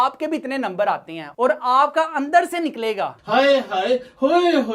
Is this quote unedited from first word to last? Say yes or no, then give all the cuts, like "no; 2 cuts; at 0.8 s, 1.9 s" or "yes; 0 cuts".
no; 1 cut; at 1.3 s